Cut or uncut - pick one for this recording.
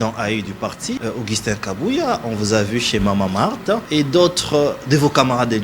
cut